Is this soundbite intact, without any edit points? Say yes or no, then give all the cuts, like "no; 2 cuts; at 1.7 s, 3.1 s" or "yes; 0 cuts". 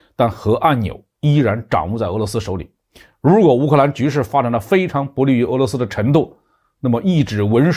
yes; 0 cuts